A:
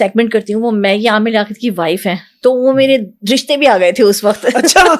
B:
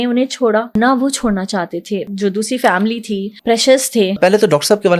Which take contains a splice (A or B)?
B